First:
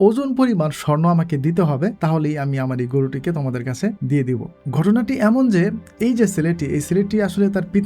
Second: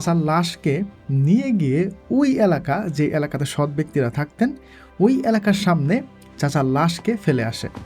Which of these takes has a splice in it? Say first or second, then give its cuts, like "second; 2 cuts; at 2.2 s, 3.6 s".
first; 2 cuts; at 2.0 s, 4.2 s